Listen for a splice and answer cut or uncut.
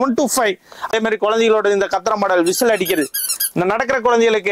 cut